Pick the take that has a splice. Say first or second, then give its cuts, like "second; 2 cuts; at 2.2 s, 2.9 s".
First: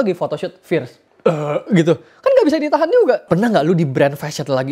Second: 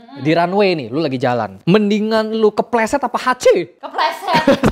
first; 2 cuts; at 1.0 s, 3.2 s